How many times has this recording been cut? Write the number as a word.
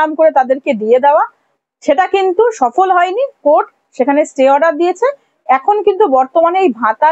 zero